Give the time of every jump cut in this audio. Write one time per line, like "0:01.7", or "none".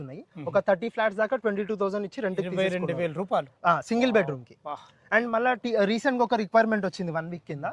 none